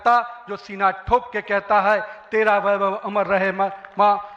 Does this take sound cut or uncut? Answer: uncut